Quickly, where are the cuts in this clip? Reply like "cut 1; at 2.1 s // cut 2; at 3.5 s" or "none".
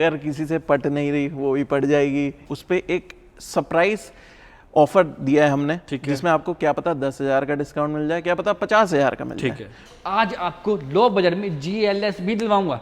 cut 1; at 2.4 s // cut 2; at 9.8 s